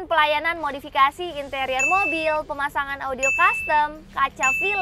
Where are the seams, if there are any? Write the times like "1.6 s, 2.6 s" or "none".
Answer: none